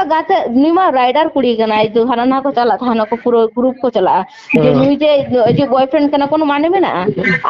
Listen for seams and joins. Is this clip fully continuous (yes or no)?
no